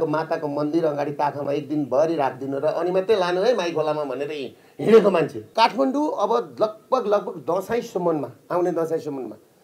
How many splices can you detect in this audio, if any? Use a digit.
1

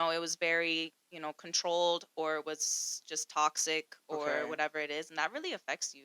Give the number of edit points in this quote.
0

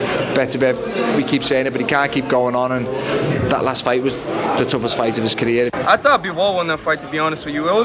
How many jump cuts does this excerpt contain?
2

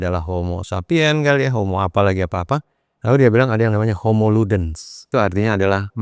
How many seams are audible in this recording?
1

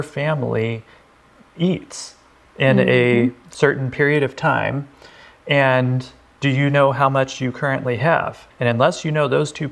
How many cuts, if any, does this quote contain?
1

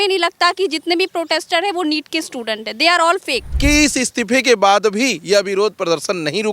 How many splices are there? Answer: 1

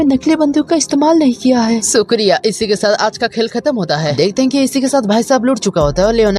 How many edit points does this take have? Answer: 0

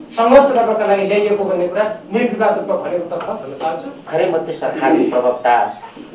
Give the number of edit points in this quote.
1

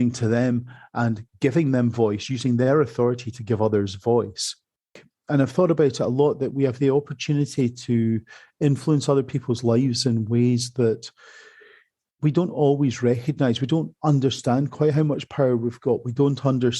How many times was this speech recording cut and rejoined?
1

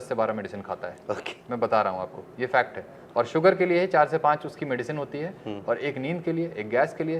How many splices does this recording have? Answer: 0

